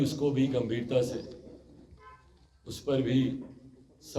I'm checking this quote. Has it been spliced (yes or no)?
no